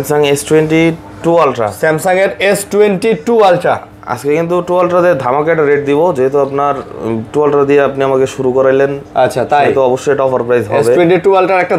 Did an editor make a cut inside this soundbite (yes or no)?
no